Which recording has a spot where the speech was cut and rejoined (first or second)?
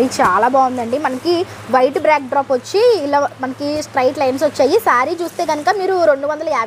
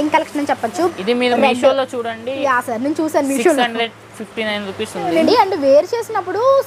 second